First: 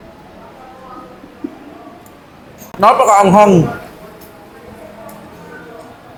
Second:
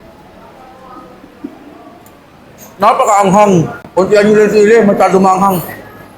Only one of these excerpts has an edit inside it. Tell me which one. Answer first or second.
second